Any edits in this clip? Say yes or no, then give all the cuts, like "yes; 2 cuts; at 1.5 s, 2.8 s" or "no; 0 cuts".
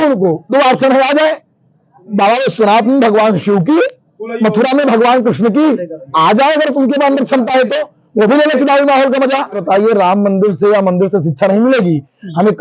yes; 1 cut; at 9.6 s